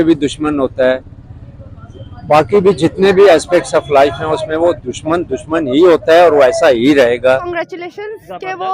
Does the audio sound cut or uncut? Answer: cut